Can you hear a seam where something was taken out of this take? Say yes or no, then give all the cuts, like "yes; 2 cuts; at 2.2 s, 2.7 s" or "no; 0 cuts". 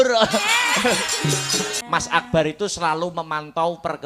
yes; 1 cut; at 1.8 s